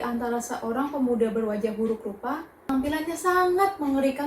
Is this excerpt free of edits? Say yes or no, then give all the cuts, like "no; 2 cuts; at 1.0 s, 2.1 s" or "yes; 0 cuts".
no; 1 cut; at 2.7 s